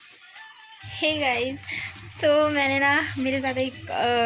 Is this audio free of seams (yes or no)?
yes